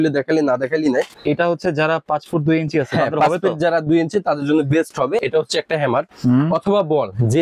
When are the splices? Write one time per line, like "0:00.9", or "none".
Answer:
0:01.1
0:05.2

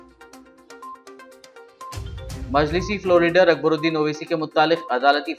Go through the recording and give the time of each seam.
none

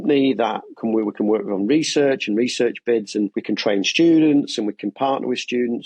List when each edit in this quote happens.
0:03.4

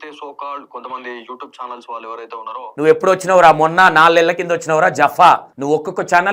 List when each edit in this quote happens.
0:02.7

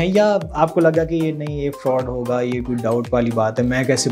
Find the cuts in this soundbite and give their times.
none

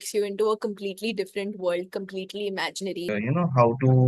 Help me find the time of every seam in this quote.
0:03.0

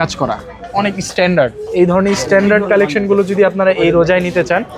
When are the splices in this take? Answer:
none

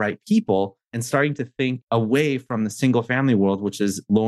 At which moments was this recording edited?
0:01.0
0:01.8

